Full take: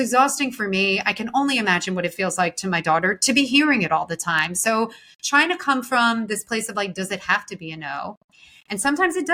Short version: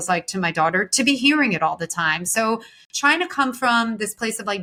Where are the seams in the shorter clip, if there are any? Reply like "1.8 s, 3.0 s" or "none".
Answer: none